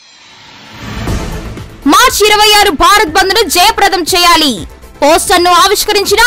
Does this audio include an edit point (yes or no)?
yes